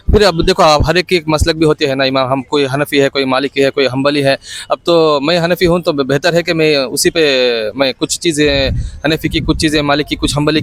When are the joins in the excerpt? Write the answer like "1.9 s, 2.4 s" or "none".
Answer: none